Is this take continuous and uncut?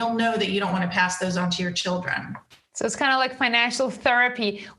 yes; 0 cuts

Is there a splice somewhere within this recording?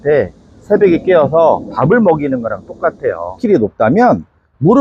yes; 1 cut; at 3.4 s

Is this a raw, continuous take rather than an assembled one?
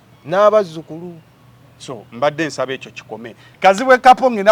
no; 1 cut; at 3.5 s

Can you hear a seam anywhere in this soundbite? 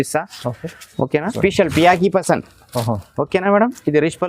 yes; 1 cut; at 1.4 s

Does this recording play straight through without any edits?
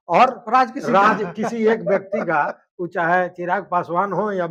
yes; 0 cuts

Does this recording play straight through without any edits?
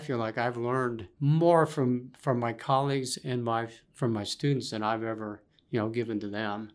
no; 1 cut; at 1.1 s

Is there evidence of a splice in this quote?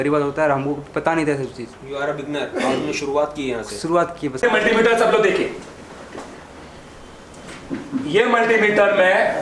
yes; 1 cut; at 4.3 s

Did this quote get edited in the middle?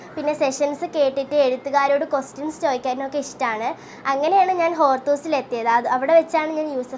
no; 0 cuts

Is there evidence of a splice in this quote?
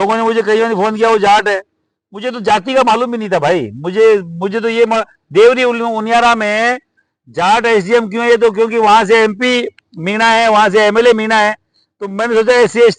no; 0 cuts

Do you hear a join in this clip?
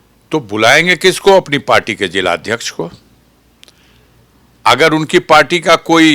no; 0 cuts

